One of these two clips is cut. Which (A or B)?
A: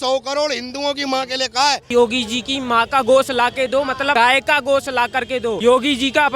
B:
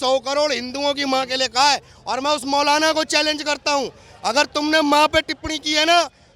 A